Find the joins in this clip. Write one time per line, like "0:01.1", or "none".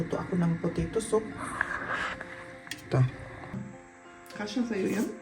0:03.6